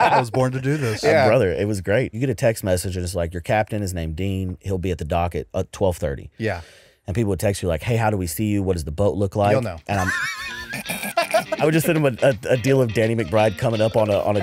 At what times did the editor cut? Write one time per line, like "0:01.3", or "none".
0:02.1
0:11.6